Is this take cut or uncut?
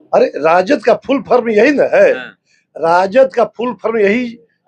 uncut